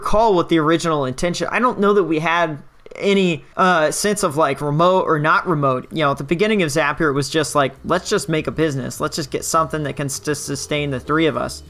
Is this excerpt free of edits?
no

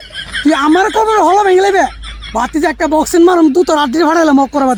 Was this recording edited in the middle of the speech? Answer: no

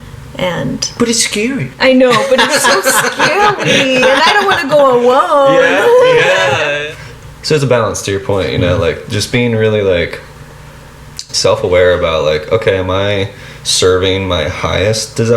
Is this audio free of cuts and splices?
no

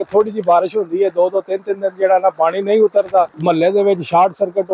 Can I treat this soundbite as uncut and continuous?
no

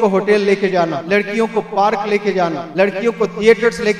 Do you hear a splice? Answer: yes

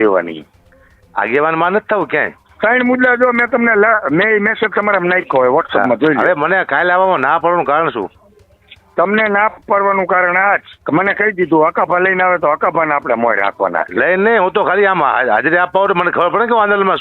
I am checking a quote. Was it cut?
yes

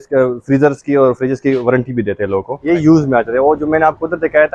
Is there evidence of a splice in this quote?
yes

